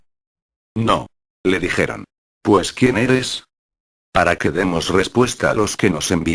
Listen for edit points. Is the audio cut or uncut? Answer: cut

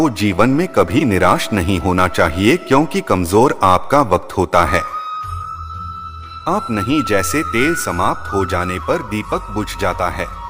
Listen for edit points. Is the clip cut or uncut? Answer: cut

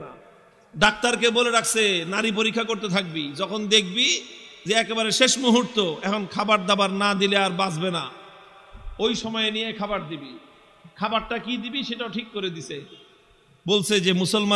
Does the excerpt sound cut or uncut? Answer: uncut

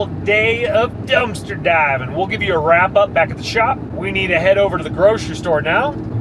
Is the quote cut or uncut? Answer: uncut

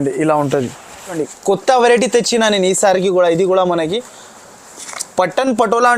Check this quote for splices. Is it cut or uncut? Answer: cut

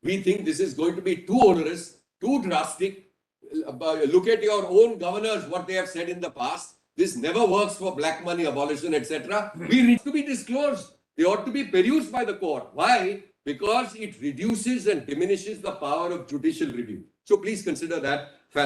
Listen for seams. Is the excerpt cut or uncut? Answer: cut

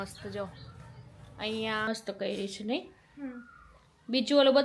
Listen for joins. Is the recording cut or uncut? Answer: cut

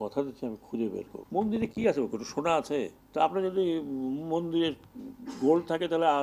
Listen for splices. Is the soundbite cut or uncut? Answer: cut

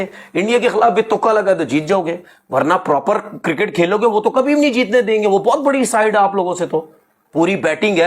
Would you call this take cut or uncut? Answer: uncut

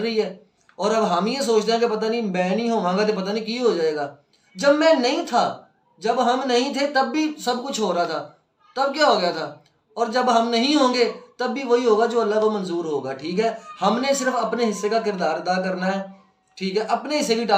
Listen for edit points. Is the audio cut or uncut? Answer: uncut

